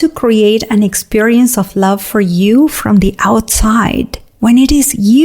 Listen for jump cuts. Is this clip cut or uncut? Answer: cut